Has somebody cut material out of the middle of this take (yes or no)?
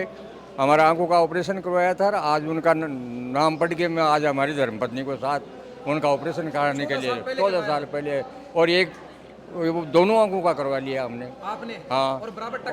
no